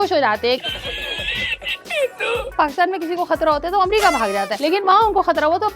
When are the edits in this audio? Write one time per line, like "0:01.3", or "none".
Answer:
0:02.5